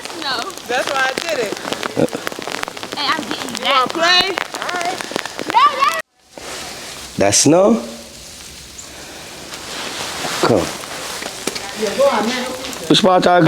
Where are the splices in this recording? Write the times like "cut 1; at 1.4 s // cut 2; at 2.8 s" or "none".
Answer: cut 1; at 5.9 s